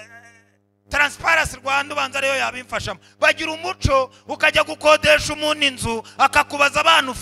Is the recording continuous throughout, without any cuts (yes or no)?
yes